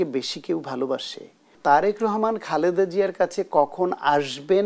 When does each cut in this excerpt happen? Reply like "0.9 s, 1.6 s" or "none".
1.5 s